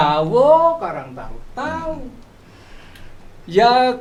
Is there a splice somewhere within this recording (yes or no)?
no